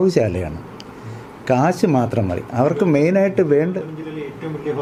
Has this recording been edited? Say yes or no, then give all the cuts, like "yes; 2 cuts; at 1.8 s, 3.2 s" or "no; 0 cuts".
no; 0 cuts